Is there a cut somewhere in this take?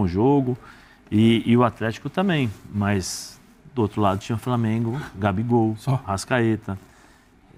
no; 0 cuts

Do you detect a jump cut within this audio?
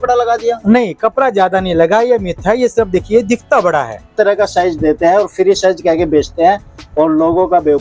yes; 1 cut; at 4.1 s

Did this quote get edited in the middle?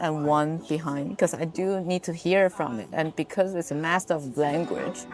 no; 0 cuts

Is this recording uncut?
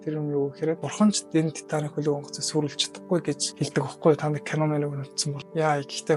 yes; 0 cuts

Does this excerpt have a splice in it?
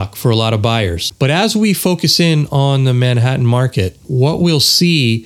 yes; 2 cuts; at 1.0 s, 4.0 s

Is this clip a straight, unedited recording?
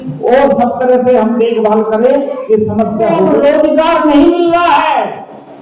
no; 1 cut; at 3.4 s

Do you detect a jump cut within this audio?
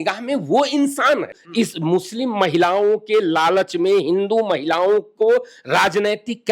yes; 1 cut; at 1.4 s

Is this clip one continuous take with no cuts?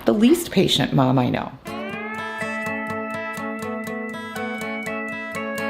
yes; 0 cuts

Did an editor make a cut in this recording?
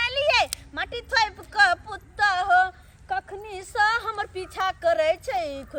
no; 0 cuts

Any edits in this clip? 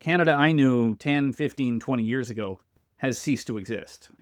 no; 0 cuts

